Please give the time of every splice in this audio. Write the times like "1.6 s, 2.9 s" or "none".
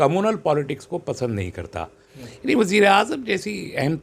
2.1 s